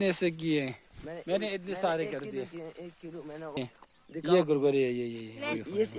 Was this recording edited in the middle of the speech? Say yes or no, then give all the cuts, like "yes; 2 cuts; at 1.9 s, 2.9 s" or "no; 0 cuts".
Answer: yes; 1 cut; at 3.6 s